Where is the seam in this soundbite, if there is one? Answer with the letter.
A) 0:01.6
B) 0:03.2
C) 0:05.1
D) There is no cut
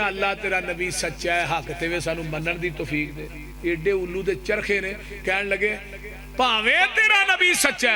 D